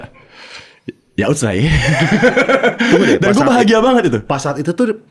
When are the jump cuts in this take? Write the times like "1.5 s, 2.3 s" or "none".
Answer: none